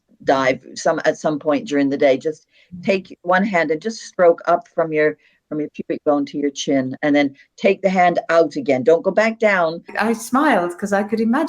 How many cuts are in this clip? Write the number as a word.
one